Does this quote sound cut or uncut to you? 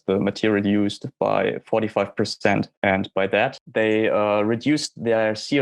cut